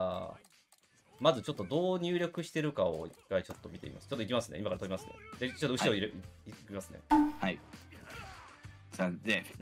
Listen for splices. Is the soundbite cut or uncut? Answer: uncut